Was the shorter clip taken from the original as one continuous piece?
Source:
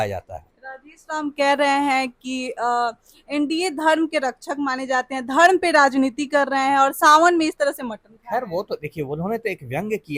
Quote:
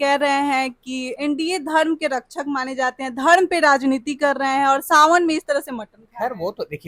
no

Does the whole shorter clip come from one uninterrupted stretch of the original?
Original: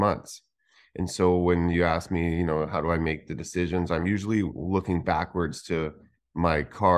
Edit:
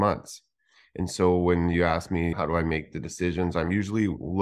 no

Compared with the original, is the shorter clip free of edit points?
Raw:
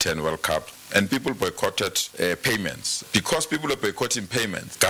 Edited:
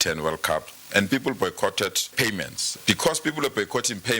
no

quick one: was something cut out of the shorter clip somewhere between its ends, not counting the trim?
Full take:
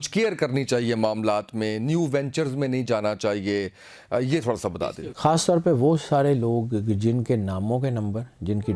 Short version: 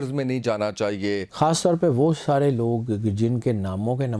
yes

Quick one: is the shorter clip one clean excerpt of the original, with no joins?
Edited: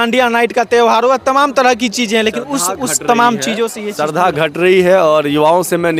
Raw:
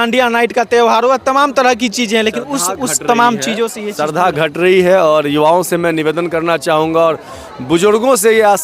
yes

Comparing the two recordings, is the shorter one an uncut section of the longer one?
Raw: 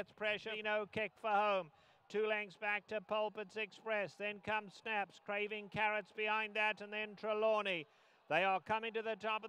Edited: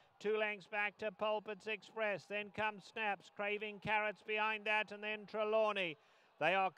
yes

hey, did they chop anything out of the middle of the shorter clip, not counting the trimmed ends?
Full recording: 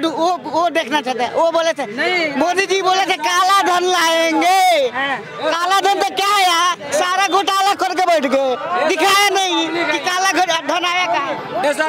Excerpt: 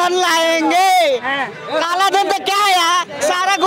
no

